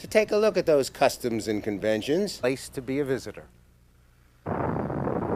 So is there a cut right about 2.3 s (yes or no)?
no